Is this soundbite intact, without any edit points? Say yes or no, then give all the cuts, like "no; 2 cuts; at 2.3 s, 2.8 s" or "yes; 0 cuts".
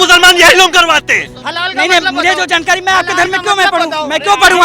no; 1 cut; at 1.4 s